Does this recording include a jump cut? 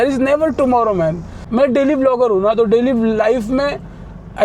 yes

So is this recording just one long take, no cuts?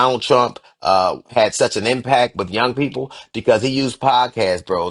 yes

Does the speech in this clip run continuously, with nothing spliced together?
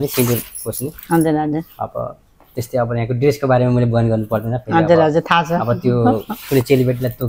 yes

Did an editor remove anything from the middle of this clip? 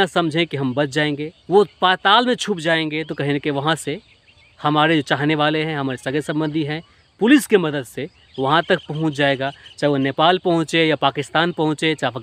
yes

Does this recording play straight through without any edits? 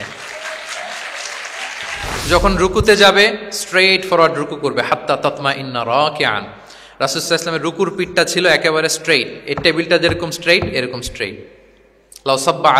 no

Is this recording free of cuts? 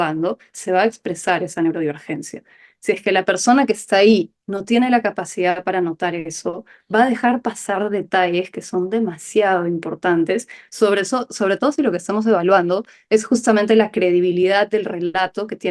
yes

